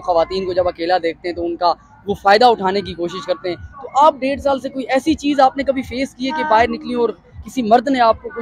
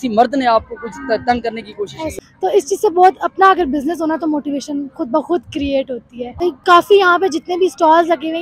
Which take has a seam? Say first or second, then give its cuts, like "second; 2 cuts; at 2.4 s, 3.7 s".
second; 2 cuts; at 2.1 s, 6.4 s